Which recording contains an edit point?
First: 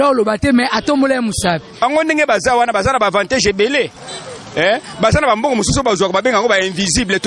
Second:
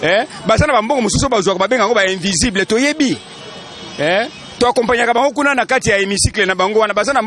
first; 1 cut; at 1.8 s

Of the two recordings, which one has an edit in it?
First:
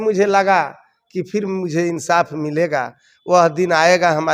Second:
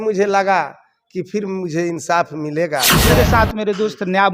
second; 1 cut; at 3.0 s

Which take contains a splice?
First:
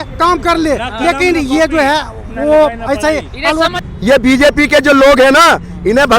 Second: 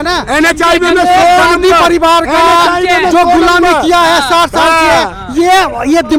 first; 1 cut; at 3.8 s

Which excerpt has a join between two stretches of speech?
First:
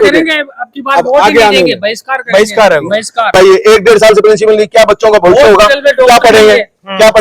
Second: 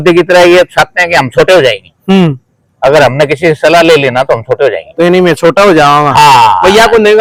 first; 1 cut; at 3.3 s

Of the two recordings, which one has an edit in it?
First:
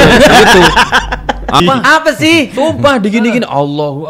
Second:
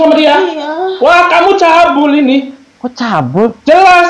first; 1 cut; at 1.6 s

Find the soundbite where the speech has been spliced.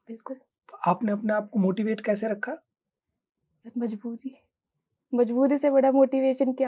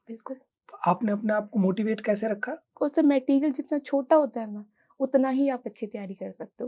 second; 1 cut; at 2.6 s

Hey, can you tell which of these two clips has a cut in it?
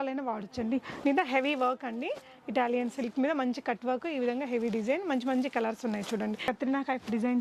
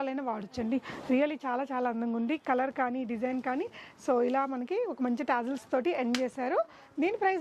first; 2 cuts; at 0.9 s, 6.4 s

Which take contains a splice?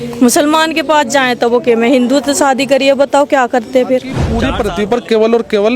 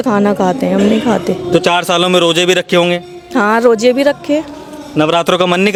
first; 1 cut; at 4.5 s

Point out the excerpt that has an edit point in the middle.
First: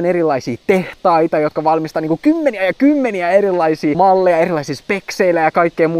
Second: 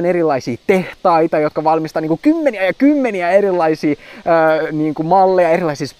first; 1 cut; at 3.9 s

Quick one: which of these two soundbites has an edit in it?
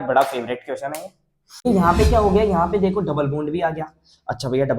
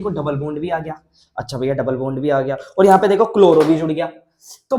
first; 1 cut; at 1.6 s

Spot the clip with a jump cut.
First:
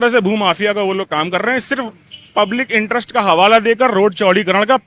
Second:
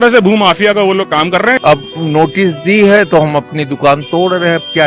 second; 1 cut; at 1.6 s

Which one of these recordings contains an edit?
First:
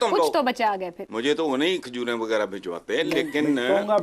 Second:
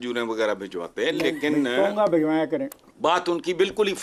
first; 1 cut; at 0.9 s

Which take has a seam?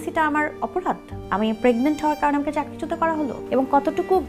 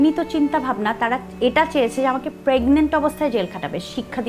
first; 2 cuts; at 1.1 s, 3.4 s

